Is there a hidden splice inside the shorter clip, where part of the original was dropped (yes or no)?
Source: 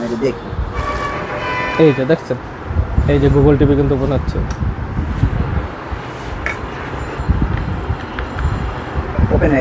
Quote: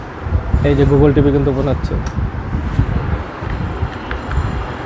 yes